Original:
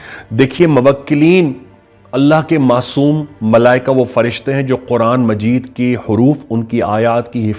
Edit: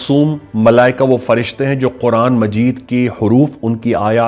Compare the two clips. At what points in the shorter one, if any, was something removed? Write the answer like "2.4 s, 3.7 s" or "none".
none